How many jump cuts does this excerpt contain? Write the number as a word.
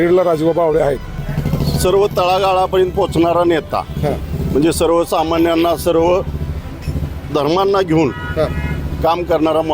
one